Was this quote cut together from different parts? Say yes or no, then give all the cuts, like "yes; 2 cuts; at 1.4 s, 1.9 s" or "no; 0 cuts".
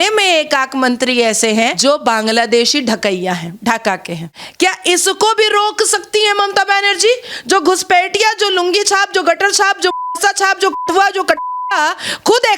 yes; 2 cuts; at 1.8 s, 4.3 s